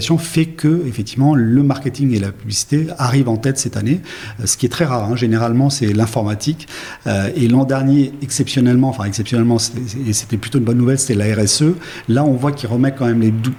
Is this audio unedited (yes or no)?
yes